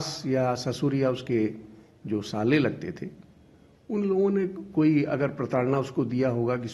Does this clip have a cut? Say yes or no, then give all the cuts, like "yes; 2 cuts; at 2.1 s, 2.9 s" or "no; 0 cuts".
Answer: no; 0 cuts